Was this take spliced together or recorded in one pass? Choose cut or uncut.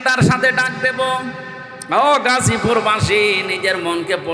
uncut